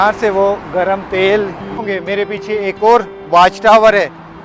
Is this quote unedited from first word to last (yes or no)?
no